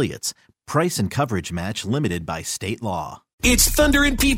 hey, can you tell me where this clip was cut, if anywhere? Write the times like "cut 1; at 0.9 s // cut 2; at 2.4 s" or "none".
cut 1; at 3.3 s